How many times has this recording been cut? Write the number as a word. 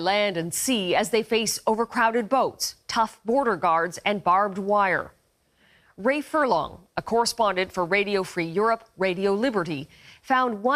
zero